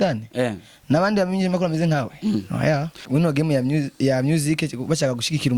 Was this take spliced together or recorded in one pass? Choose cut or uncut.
cut